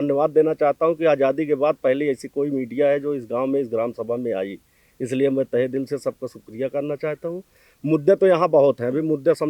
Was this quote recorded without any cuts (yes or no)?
yes